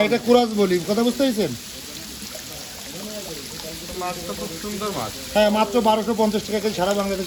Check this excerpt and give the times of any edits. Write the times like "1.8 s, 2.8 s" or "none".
none